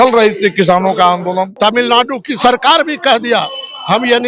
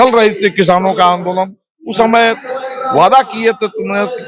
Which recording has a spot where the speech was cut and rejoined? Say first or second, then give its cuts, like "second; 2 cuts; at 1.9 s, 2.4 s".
first; 1 cut; at 1.5 s